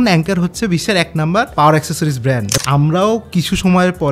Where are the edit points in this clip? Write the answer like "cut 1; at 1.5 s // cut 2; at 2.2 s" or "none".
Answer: cut 1; at 1.5 s // cut 2; at 2.5 s